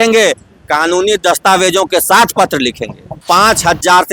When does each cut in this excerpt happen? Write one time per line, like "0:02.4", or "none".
0:03.2